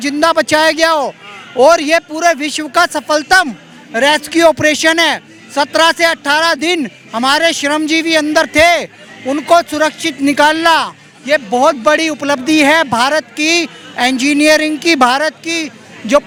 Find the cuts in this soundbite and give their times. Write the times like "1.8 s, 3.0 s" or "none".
none